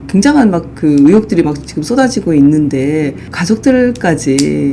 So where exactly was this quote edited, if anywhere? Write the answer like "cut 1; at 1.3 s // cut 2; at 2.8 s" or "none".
cut 1; at 3.3 s